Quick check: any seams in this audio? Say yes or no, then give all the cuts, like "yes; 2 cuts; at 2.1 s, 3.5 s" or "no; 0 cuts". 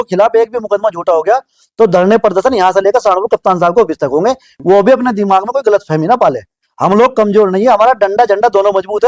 yes; 1 cut; at 4.5 s